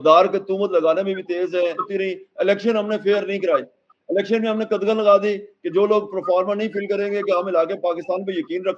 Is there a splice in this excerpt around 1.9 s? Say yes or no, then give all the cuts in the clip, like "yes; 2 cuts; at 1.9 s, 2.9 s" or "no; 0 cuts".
yes; 1 cut; at 1.9 s